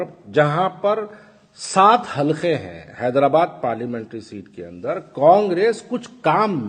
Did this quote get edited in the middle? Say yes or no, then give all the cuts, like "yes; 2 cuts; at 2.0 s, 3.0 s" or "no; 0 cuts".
no; 0 cuts